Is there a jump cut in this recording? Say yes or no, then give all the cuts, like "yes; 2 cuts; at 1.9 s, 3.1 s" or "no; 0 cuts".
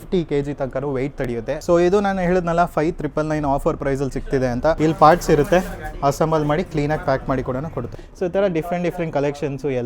yes; 3 cuts; at 1.6 s, 4.8 s, 8.0 s